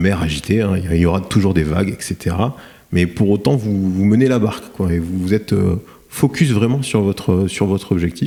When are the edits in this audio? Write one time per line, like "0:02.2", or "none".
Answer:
none